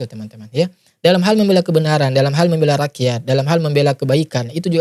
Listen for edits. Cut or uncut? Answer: uncut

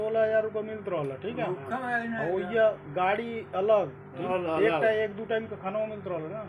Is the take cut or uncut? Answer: cut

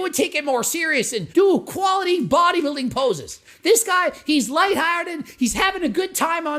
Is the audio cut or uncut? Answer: cut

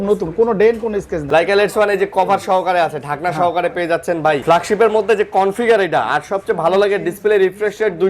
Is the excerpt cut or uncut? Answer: cut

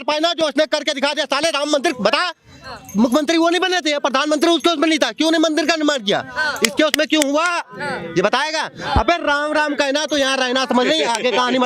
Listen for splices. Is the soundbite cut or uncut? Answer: uncut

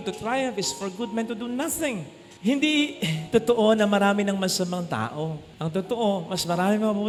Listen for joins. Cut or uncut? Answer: uncut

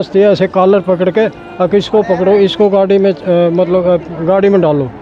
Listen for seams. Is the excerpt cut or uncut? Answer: uncut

